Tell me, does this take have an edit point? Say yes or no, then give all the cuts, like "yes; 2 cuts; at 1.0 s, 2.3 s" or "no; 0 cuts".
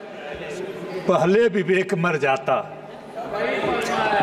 no; 0 cuts